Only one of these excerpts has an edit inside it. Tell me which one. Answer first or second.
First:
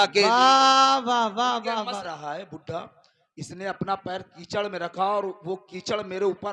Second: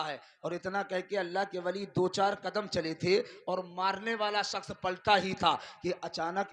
first